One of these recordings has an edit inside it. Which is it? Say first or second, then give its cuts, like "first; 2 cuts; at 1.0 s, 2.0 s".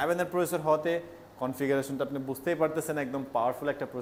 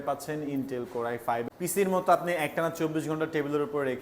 second; 1 cut; at 1.5 s